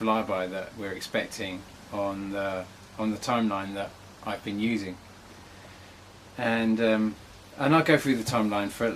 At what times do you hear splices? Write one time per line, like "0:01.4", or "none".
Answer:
0:01.4